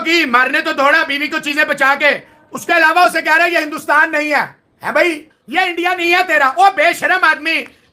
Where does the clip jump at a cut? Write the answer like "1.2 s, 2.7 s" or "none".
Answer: none